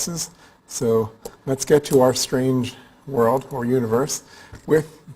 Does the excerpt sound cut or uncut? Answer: cut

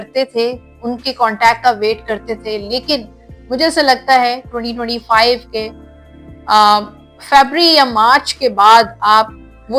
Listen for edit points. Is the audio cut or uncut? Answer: uncut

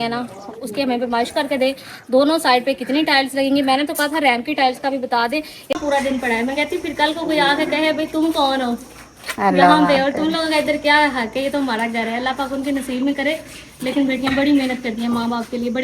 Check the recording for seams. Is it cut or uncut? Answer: cut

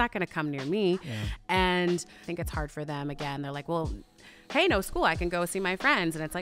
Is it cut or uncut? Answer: cut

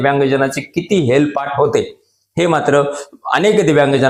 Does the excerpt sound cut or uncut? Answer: uncut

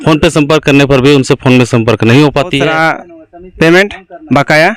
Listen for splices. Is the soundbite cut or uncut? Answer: cut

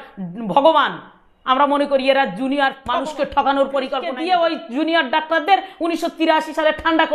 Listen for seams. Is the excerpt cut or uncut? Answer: cut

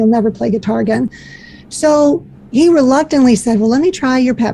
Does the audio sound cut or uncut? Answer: cut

